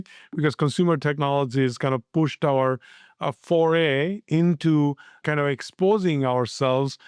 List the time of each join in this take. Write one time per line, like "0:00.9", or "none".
0:05.2